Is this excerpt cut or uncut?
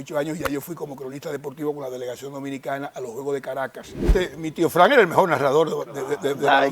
cut